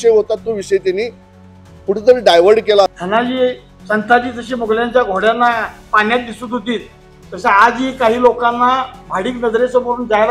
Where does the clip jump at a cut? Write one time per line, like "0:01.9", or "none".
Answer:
0:02.9